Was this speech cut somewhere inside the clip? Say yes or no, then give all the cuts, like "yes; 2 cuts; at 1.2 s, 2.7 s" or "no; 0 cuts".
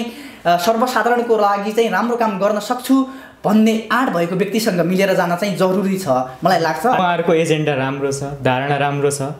yes; 1 cut; at 7.0 s